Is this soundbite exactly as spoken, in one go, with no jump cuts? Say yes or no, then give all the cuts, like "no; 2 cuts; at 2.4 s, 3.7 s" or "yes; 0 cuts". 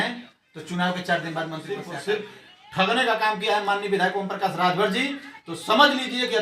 no; 1 cut; at 1.8 s